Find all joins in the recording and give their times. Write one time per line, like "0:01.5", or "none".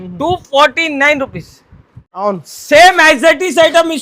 0:02.1

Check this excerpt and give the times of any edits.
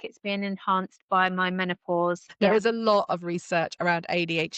0:02.2

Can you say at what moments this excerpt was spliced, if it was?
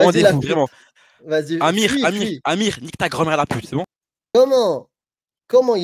0:04.2

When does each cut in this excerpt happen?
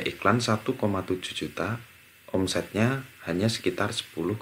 none

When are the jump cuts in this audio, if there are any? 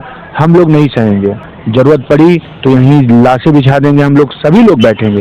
0:01.4

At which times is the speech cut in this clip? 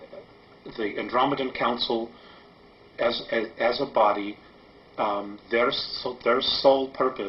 none

